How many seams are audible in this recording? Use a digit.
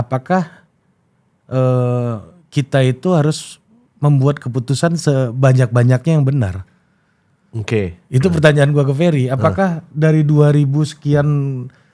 0